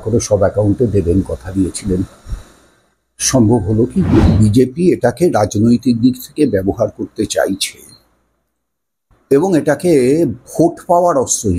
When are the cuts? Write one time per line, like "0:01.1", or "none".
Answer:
0:04.2